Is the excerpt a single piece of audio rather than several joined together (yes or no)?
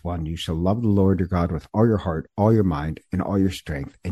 yes